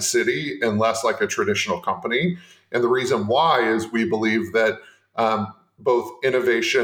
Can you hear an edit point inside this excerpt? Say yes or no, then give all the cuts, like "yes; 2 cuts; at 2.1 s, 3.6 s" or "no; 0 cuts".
no; 0 cuts